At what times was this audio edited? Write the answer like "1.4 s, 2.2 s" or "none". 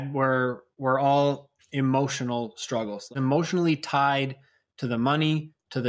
3.1 s